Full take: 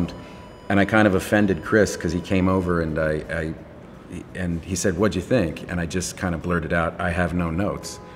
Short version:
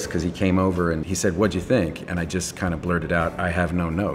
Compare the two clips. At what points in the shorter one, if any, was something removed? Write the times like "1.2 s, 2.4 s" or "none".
1.0 s